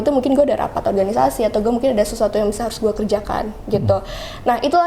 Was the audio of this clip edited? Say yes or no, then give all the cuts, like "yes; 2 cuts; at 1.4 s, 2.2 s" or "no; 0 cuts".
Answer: no; 0 cuts